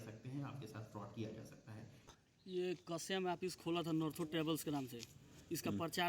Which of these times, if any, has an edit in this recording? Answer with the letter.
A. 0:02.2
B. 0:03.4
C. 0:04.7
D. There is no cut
A